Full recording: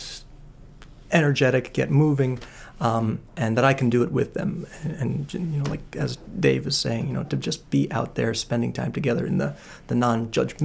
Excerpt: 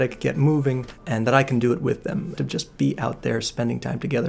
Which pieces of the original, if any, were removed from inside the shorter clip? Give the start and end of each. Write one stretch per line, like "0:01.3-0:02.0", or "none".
0:02.5-0:03.3
0:04.6-0:07.3